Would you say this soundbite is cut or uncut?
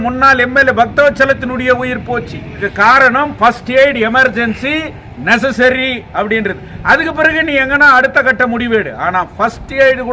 cut